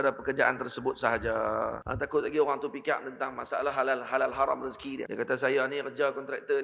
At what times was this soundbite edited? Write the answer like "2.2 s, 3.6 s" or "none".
1.8 s, 5.1 s